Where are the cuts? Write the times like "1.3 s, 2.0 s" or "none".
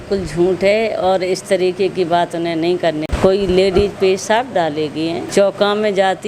3.1 s, 5.3 s